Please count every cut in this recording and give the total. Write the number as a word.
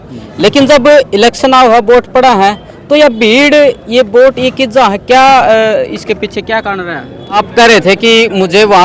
one